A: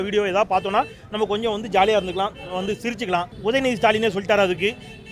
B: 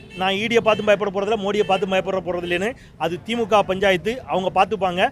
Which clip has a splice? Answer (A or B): A